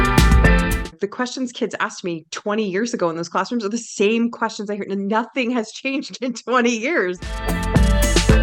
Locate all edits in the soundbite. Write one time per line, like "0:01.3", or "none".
0:00.8
0:07.4